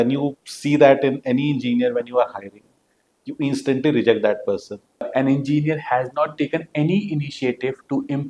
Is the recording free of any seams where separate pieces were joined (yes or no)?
no